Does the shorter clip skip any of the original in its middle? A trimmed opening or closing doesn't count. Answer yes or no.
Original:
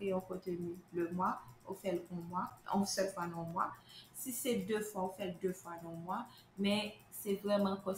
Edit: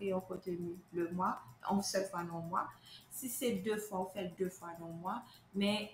yes